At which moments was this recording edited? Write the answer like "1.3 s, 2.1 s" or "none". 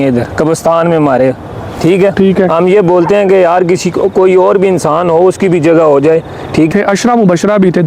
6.7 s